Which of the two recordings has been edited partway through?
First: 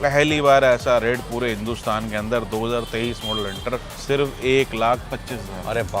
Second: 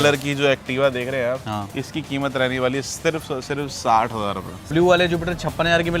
second; 1 cut; at 4.7 s

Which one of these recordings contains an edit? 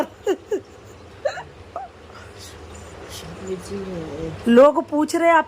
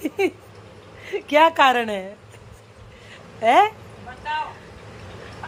first; 1 cut; at 1.3 s

